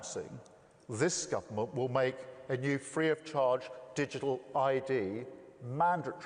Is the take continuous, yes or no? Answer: yes